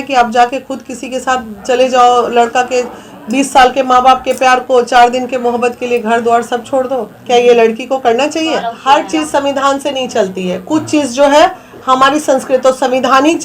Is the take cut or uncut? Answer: cut